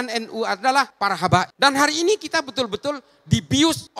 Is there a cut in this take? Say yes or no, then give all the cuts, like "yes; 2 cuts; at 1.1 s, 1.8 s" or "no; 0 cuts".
yes; 1 cut; at 1.3 s